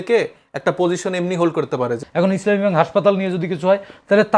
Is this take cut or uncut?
cut